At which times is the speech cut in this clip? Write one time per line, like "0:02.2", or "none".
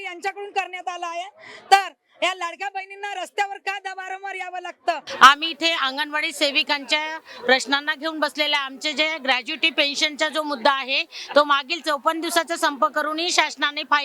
none